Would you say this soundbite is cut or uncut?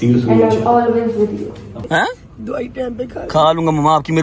cut